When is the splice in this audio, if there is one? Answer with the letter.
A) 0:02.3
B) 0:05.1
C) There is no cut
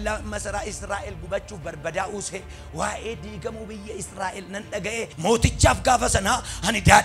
B